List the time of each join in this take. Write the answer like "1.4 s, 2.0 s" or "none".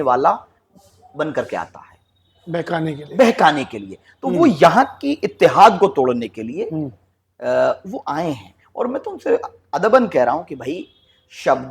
none